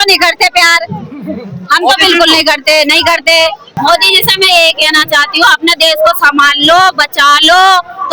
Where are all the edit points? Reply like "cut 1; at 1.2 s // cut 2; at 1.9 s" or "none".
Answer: cut 1; at 3.7 s